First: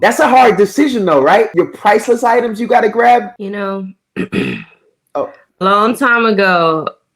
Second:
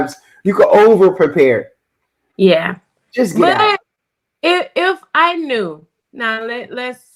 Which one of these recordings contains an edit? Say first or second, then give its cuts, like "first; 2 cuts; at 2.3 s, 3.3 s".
first; 2 cuts; at 1.5 s, 3.3 s